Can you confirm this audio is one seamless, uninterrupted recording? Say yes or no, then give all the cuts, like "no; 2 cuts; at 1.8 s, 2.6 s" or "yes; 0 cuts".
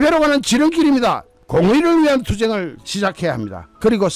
no; 1 cut; at 1.3 s